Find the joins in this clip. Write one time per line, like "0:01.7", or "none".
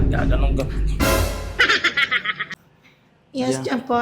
0:02.3